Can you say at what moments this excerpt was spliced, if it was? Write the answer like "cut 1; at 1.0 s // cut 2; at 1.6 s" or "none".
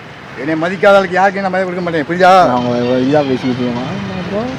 none